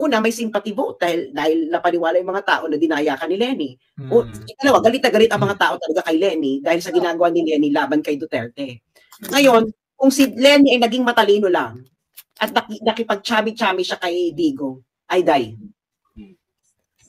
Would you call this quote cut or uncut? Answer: uncut